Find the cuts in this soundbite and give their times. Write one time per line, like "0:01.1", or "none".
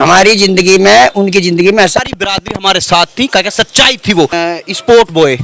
0:02.0
0:04.3